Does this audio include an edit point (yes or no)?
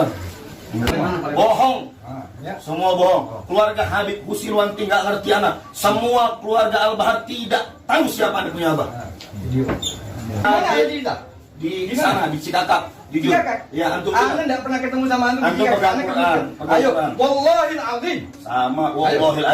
yes